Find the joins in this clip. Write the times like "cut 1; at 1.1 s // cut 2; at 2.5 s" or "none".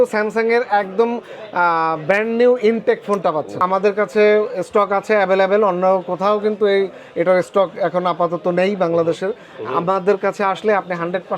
cut 1; at 3.6 s

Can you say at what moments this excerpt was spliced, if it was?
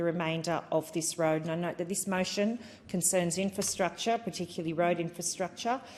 none

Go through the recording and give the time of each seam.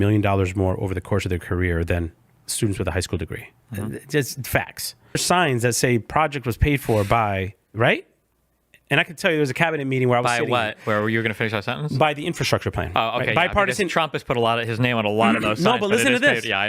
cut 1; at 5.2 s

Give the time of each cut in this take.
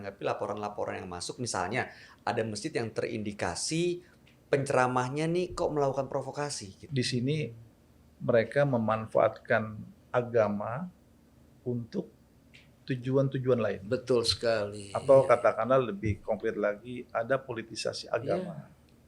cut 1; at 6.8 s

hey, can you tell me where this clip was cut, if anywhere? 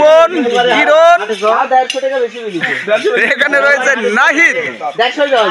none

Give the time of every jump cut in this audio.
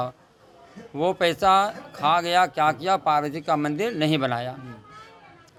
none

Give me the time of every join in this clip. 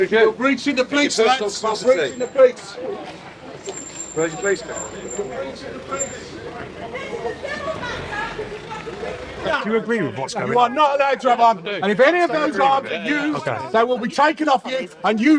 cut 1; at 9.4 s

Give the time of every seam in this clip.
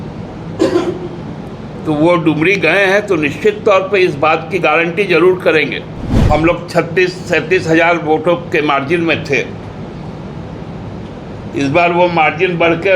cut 1; at 6.1 s

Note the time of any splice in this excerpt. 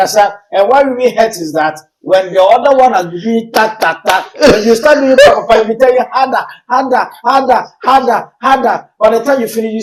none

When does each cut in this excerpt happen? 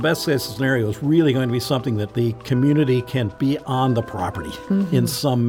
cut 1; at 2.1 s // cut 2; at 3.3 s

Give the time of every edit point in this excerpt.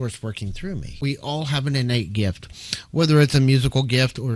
cut 1; at 1.0 s

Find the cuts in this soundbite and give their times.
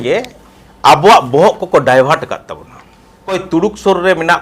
cut 1; at 3.3 s

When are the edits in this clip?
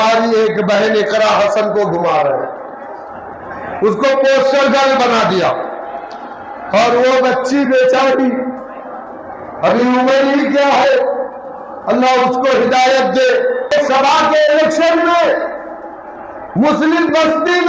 cut 1; at 13.7 s

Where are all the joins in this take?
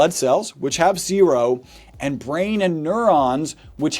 none

